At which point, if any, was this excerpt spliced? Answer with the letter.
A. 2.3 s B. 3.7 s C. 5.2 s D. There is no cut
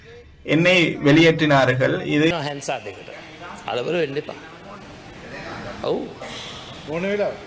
A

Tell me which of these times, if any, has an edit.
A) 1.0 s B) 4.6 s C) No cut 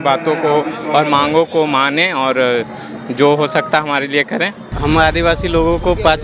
B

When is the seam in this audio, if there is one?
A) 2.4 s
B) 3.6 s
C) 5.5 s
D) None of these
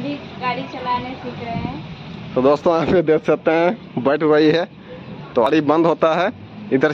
C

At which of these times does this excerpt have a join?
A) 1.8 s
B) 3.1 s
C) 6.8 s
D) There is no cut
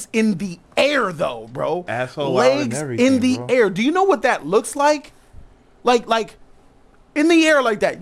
D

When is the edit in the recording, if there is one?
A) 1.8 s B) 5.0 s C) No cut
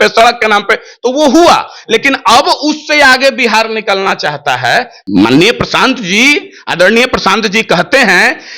B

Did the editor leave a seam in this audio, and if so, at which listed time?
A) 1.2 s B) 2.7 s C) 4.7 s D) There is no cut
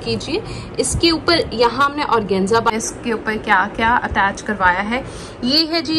B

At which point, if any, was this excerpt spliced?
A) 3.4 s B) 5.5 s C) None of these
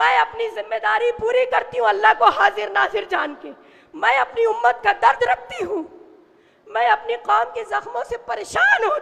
C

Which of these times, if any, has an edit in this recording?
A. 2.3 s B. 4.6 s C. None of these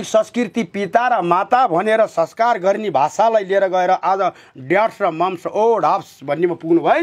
C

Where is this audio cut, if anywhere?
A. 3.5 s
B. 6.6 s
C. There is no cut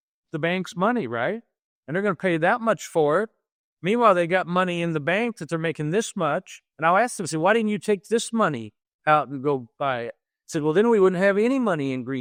C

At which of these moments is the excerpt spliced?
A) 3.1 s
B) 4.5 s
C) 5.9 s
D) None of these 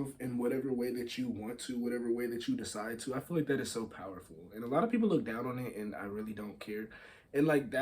D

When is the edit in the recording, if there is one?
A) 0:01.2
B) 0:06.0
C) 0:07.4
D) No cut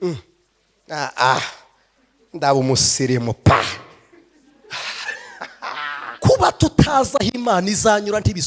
B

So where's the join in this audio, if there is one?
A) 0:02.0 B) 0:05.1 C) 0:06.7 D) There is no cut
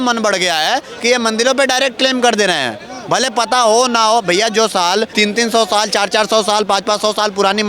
B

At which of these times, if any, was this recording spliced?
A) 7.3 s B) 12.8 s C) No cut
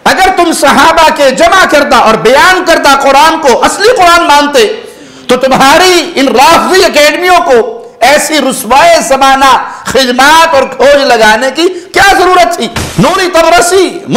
B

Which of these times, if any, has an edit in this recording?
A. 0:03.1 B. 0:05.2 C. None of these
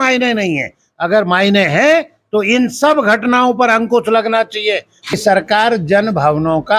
B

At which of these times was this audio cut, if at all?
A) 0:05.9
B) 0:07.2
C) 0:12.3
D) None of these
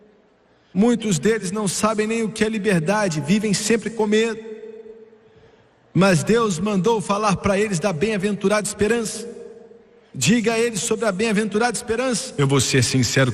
C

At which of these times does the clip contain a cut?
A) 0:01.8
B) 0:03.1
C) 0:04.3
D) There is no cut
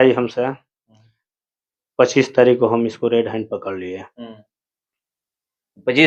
D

